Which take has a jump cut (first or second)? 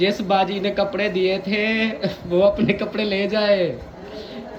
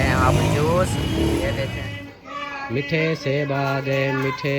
second